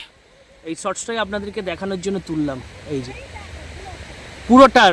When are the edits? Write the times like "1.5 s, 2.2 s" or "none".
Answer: none